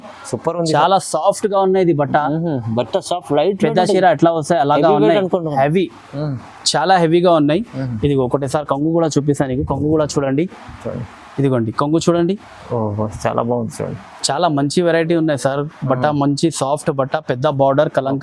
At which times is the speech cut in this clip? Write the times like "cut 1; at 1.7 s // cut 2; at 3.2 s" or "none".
none